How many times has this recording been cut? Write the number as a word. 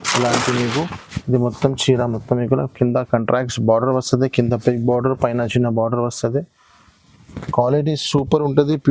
one